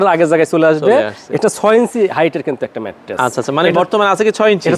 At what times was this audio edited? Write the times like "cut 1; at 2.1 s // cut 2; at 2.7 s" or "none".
none